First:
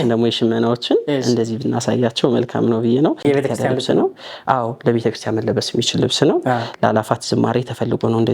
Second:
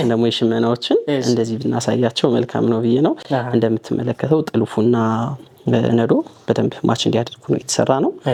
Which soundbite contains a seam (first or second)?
first